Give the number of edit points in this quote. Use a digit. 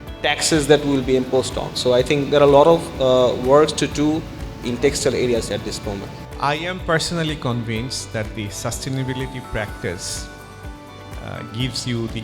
1